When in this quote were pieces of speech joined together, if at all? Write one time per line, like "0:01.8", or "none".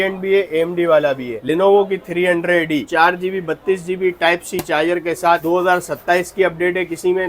0:01.3
0:05.4